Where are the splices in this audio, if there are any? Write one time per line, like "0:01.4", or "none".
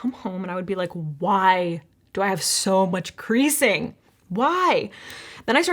none